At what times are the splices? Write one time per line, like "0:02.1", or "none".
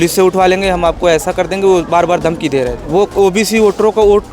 0:02.8